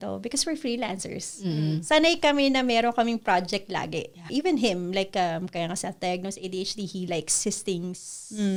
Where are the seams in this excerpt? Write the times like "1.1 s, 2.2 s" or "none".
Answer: none